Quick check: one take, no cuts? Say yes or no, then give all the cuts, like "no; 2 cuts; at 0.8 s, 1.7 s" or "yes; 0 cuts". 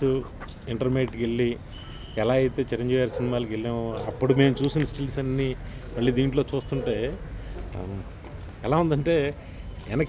yes; 0 cuts